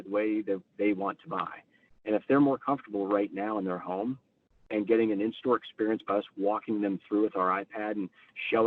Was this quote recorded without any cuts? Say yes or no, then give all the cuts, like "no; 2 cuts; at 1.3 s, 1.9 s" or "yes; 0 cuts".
yes; 0 cuts